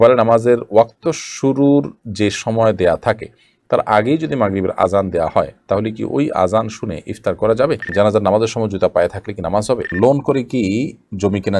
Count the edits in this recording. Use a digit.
2